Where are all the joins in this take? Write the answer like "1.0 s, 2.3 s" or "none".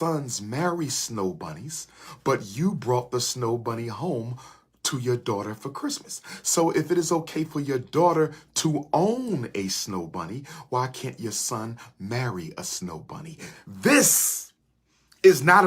13.5 s